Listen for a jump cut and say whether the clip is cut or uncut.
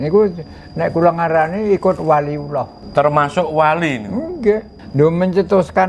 cut